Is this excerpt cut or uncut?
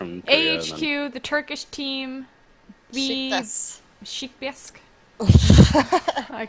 uncut